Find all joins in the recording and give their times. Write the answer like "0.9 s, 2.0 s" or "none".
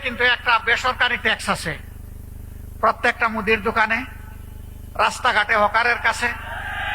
none